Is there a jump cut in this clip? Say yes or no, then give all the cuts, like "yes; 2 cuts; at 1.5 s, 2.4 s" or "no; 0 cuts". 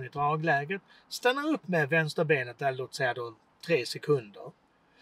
no; 0 cuts